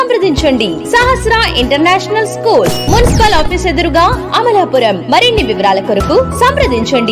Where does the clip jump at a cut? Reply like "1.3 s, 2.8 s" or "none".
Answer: none